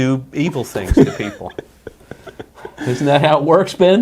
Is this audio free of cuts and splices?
yes; 0 cuts

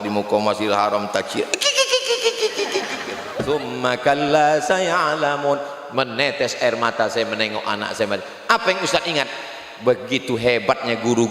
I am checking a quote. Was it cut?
yes; 1 cut; at 3.4 s

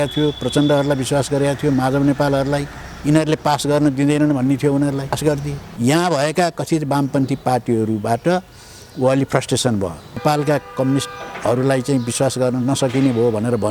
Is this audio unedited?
no; 2 cuts; at 5.4 s, 10.2 s

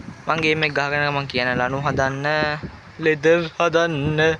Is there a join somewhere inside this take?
no; 0 cuts

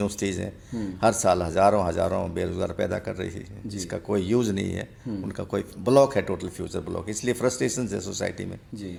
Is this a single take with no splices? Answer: yes; 0 cuts

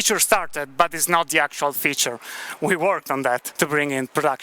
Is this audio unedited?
no; 1 cut; at 3.5 s

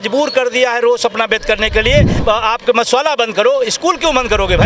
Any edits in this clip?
yes; 1 cut; at 2.1 s

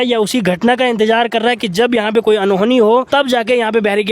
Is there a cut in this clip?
yes; 1 cut; at 3.1 s

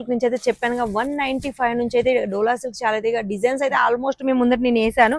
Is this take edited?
no; 0 cuts

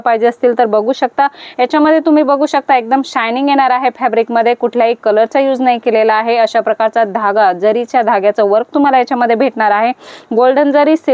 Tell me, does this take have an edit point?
no; 0 cuts

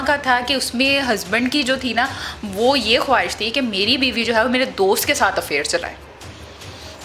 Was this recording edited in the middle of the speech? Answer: no; 0 cuts

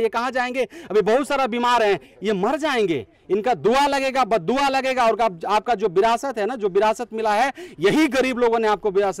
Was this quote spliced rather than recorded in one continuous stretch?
no; 0 cuts

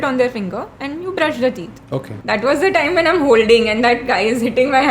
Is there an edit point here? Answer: yes; 1 cut; at 2.1 s

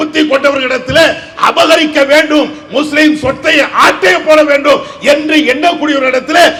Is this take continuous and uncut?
yes; 0 cuts

